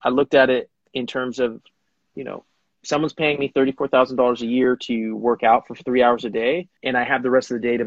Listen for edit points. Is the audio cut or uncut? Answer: cut